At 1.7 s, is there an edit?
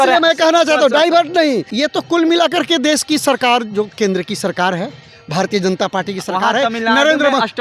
yes; 1 cut; at 1.7 s

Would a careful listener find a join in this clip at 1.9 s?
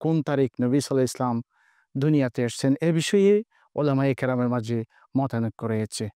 no; 0 cuts

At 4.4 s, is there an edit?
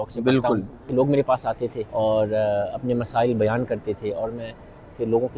no; 2 cuts; at 0.8 s, 1.8 s

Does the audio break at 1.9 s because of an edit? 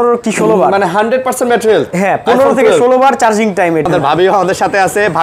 no; 1 cut; at 3.8 s

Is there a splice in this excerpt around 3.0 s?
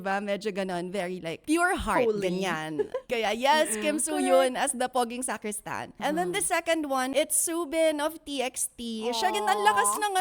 yes; 5 cuts; at 1.4 s, 3.0 s, 4.9 s, 5.9 s, 7.1 s

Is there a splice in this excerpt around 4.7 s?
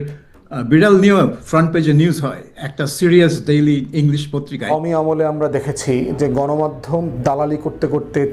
yes; 1 cut; at 4.7 s

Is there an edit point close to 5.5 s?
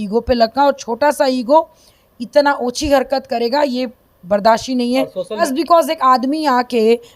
yes; 1 cut; at 5.5 s

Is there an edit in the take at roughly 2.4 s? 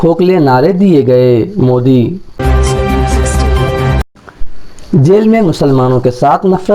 yes; 2 cuts; at 2.4 s, 4.2 s

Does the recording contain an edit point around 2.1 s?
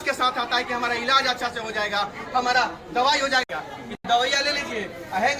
no; 1 cut; at 3.4 s

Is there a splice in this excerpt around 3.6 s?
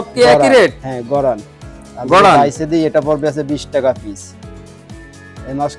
no; 0 cuts

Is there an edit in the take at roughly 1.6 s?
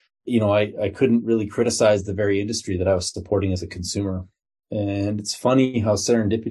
no; 0 cuts

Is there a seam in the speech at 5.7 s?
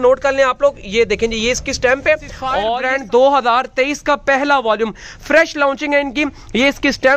no; 1 cut; at 2.6 s

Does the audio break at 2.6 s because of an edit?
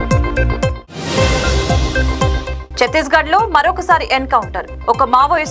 yes; 1 cut; at 2.6 s

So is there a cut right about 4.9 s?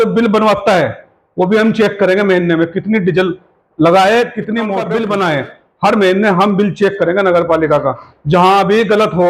yes; 1 cut; at 4.9 s

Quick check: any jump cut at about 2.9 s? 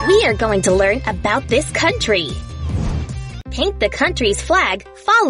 yes; 1 cut; at 2.9 s

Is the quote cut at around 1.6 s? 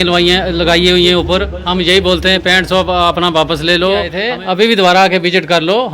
no; 1 cut; at 4.2 s

